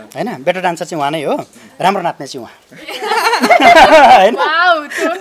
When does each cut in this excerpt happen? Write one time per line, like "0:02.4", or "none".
none